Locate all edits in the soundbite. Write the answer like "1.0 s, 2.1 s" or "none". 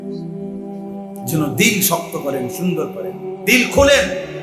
1.3 s